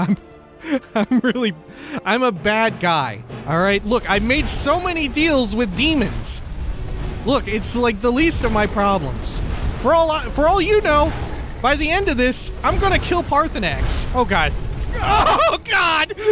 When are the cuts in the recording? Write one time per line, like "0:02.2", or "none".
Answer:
0:15.0